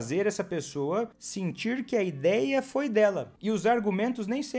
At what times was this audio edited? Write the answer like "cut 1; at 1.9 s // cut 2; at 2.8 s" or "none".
cut 1; at 1.2 s // cut 2; at 3.3 s